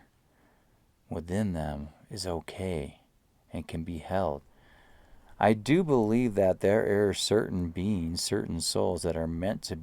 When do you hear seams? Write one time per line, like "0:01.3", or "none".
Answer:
0:04.5